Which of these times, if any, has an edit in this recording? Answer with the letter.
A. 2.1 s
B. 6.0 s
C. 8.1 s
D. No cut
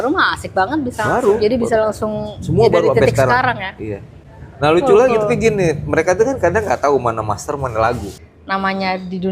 C